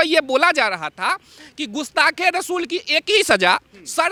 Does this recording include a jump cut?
no; 0 cuts

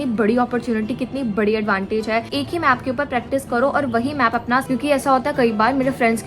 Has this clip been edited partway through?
yes; 2 cuts; at 2.3 s, 4.6 s

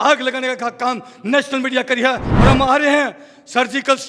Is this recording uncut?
no; 1 cut; at 2.3 s

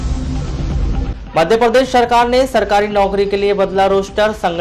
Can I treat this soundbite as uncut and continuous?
yes; 0 cuts

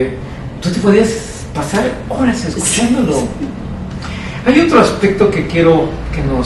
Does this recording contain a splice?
no; 0 cuts

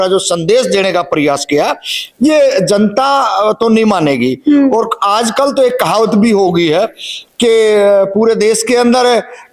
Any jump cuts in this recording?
no; 0 cuts

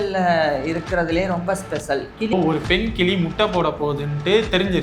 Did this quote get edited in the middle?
yes; 1 cut; at 2.3 s

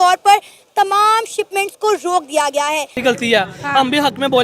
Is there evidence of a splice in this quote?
yes; 1 cut; at 3.0 s

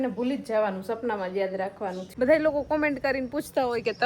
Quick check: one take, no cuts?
no; 1 cut; at 2.0 s

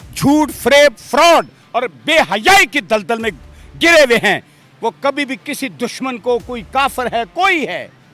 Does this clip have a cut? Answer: no; 0 cuts

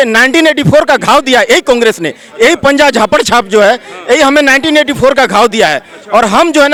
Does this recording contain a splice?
no; 0 cuts

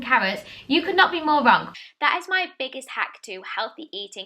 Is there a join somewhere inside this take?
yes; 1 cut; at 1.7 s

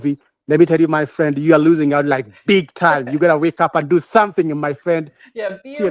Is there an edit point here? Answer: no; 0 cuts

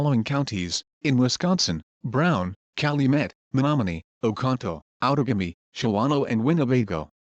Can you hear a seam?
yes; 2 cuts; at 1.8 s, 6.1 s

